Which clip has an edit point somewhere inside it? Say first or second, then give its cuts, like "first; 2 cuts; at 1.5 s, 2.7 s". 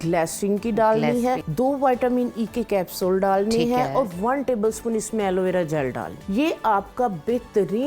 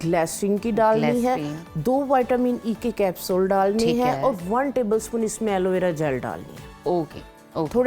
first; 2 cuts; at 1.5 s, 6.1 s